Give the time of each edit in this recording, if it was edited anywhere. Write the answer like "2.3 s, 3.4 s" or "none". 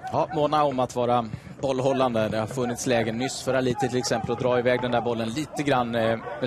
1.0 s